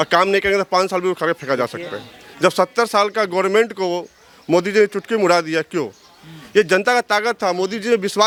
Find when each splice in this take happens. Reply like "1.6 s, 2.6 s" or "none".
none